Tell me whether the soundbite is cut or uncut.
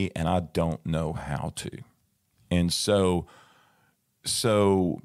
uncut